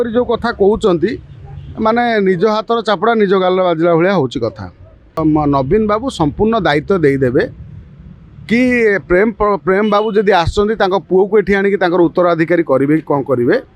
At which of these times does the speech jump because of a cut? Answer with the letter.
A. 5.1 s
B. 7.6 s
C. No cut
A